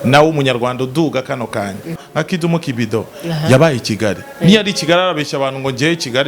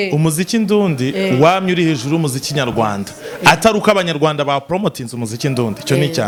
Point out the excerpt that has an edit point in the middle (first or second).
first